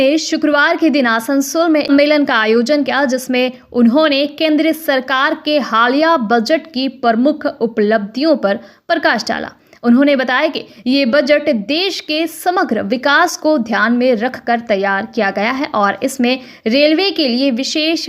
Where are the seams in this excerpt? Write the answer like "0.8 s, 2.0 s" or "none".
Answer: 1.9 s